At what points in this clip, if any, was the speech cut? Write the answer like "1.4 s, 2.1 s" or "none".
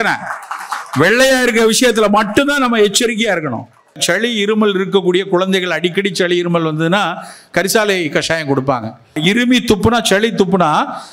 4.0 s, 9.2 s